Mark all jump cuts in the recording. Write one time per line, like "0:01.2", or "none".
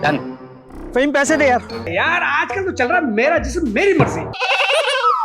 0:01.9
0:04.3